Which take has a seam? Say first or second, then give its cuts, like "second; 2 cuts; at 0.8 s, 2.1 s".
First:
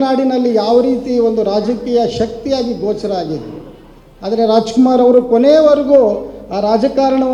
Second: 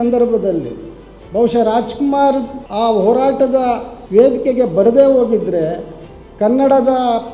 second; 2 cuts; at 2.6 s, 3.9 s